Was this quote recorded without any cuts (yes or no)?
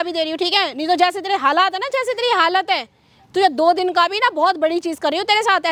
yes